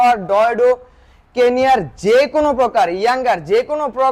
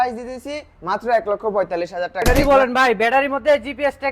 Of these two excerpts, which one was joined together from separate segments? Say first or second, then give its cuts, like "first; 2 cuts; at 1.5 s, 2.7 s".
second; 1 cut; at 2.2 s